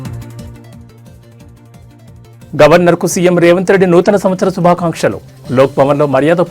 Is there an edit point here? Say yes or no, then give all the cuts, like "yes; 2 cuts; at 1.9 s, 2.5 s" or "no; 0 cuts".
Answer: yes; 1 cut; at 2.4 s